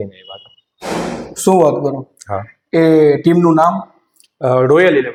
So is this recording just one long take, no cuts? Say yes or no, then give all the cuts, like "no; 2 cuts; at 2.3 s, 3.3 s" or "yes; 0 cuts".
yes; 0 cuts